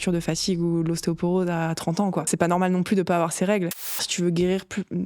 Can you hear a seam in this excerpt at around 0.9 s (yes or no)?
no